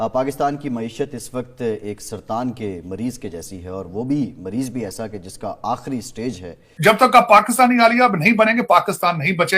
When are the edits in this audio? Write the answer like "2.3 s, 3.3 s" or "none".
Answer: 6.6 s